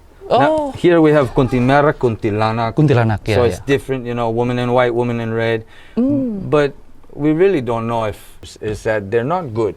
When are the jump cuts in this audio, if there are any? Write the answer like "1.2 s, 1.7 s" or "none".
8.5 s